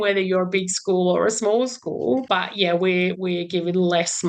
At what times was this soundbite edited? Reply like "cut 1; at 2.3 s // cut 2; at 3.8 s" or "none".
cut 1; at 2.2 s // cut 2; at 3.2 s